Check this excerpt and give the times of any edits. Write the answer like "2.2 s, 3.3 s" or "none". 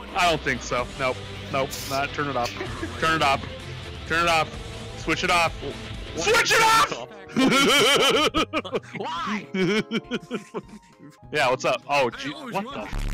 none